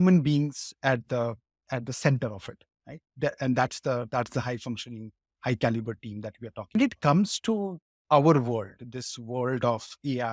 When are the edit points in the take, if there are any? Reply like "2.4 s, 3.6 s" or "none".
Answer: 6.7 s